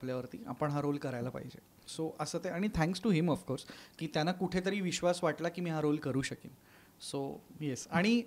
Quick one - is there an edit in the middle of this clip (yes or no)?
no